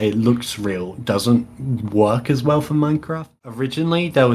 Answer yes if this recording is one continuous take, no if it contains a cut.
no